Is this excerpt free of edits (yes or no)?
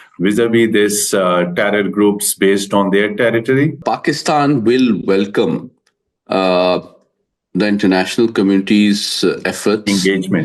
no